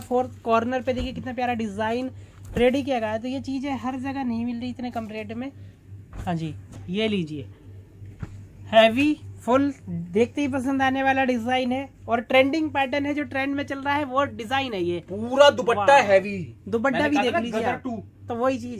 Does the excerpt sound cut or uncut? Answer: cut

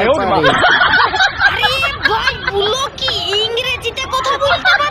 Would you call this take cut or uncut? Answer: uncut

